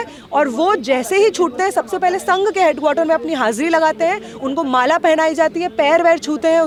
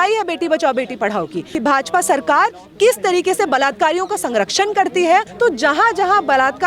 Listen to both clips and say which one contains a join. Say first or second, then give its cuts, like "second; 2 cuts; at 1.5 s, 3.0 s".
second; 2 cuts; at 1.4 s, 5.3 s